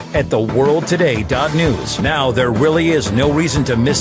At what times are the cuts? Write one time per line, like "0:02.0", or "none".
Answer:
0:01.9